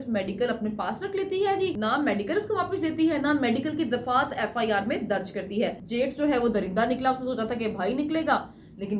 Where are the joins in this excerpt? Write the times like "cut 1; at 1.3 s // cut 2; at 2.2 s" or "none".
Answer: cut 1; at 1.8 s // cut 2; at 5.8 s